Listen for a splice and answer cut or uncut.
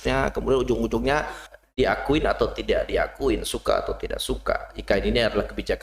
cut